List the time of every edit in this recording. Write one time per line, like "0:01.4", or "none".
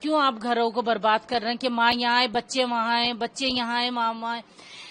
none